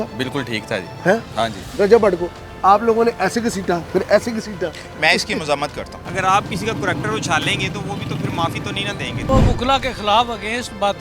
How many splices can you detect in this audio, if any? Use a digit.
3